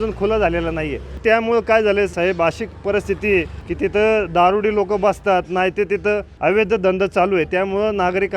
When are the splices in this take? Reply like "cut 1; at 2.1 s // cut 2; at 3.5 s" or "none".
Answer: cut 1; at 1.2 s // cut 2; at 2.1 s // cut 3; at 3.6 s // cut 4; at 6.3 s

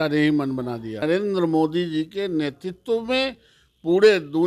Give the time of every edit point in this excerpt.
cut 1; at 1.0 s

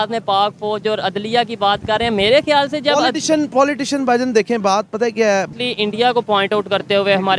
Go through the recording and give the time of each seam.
cut 1; at 5.5 s

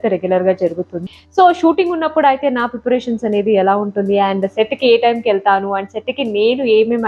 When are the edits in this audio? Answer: cut 1; at 1.0 s

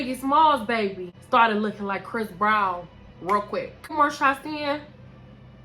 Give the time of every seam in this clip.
cut 1; at 1.1 s // cut 2; at 3.9 s

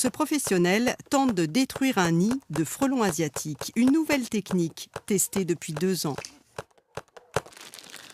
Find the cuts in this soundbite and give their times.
cut 1; at 4.7 s

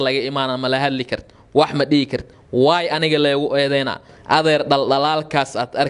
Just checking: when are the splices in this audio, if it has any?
cut 1; at 4.1 s

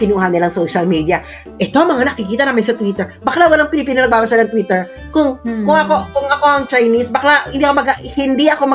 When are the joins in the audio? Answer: none

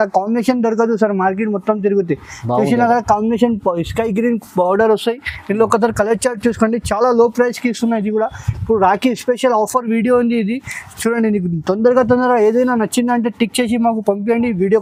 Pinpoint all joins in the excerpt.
none

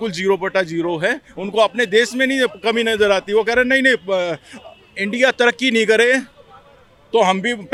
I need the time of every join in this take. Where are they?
none

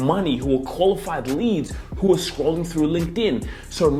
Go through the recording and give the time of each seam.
none

